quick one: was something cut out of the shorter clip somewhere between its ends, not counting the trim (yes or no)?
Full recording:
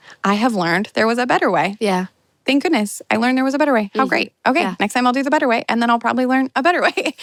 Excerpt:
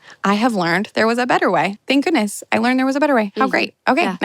yes